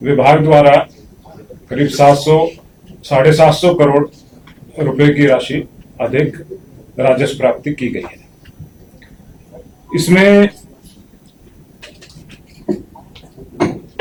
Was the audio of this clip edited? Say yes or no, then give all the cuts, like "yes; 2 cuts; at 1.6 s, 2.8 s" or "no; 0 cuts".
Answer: no; 0 cuts